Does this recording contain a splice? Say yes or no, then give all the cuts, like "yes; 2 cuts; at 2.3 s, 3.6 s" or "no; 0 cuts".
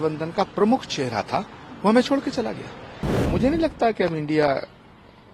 yes; 1 cut; at 3.2 s